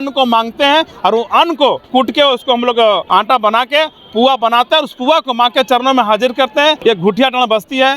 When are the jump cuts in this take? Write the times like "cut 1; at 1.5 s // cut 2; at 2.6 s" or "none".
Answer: cut 1; at 1.9 s // cut 2; at 3.0 s // cut 3; at 6.8 s

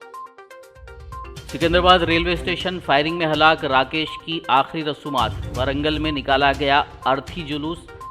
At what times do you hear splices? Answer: cut 1; at 1.3 s

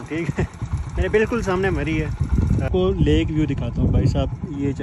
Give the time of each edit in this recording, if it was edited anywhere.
cut 1; at 2.7 s

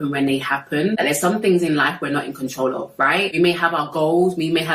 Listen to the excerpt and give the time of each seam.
cut 1; at 1.0 s // cut 2; at 3.4 s

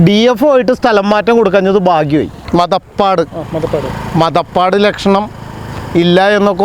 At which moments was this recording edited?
cut 1; at 2.4 s

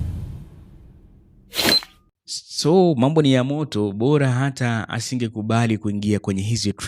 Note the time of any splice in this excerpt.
cut 1; at 2.0 s

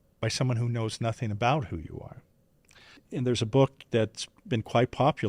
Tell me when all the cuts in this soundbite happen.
cut 1; at 3.0 s

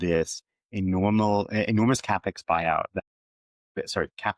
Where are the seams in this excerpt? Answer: none

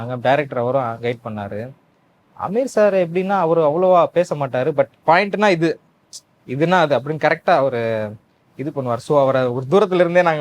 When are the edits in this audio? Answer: cut 1; at 5.0 s

